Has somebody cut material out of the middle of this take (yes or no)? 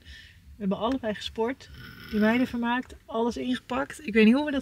no